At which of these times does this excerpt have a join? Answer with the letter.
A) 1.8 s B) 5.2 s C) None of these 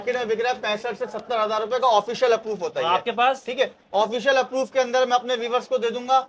C